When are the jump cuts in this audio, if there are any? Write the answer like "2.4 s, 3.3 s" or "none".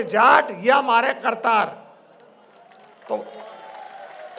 none